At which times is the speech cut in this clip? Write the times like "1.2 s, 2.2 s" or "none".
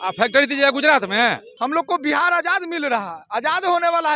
1.5 s